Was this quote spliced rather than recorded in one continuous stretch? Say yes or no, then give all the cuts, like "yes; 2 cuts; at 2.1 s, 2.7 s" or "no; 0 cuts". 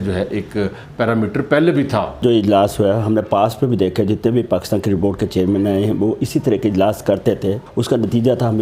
yes; 2 cuts; at 2.2 s, 7.6 s